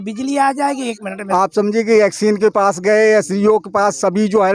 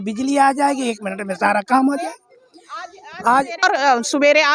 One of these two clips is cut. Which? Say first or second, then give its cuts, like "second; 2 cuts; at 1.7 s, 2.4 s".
first; 1 cut; at 1.1 s